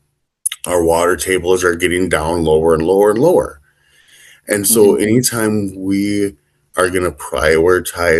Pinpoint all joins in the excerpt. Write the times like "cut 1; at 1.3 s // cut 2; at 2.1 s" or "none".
none